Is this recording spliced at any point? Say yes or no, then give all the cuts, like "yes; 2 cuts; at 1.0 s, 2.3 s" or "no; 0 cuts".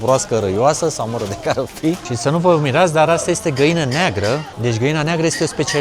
yes; 2 cuts; at 2.1 s, 4.5 s